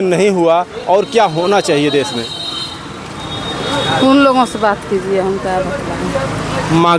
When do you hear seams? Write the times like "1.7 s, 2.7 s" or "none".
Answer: none